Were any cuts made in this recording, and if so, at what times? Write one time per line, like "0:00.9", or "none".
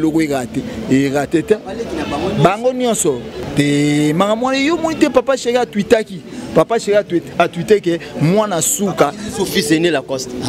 0:03.4

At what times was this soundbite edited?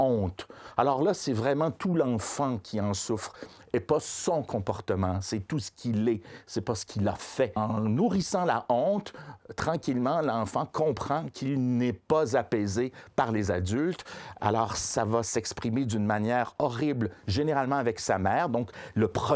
0:07.5

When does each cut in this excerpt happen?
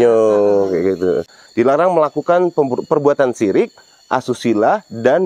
0:01.3

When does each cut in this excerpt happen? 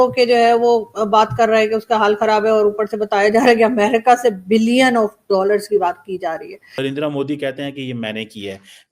0:06.8

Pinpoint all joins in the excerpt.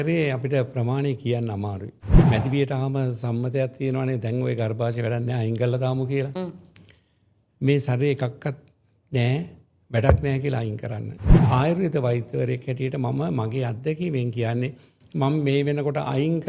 0:02.2
0:11.3

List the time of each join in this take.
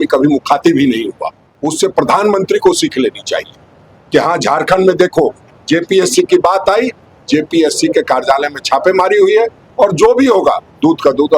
0:01.5

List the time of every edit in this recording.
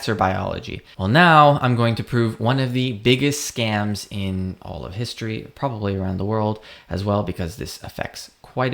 0:01.0

